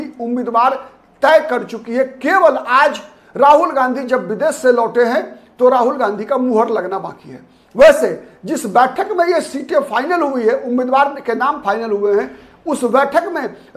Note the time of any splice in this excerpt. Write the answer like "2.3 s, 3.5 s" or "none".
none